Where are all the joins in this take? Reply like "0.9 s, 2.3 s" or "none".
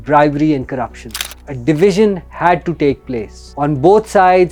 1.4 s